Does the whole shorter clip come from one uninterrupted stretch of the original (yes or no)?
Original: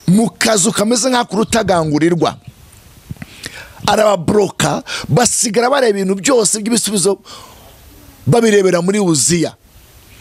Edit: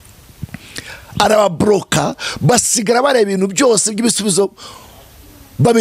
yes